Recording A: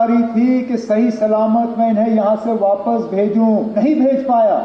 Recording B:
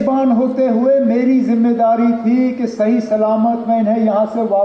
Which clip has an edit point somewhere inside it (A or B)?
A